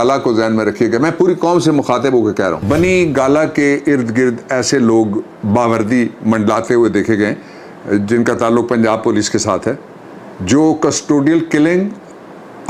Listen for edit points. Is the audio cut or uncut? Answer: cut